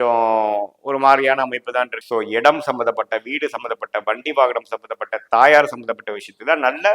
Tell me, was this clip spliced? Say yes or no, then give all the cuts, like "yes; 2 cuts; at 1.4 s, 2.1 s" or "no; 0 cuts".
yes; 1 cut; at 2.0 s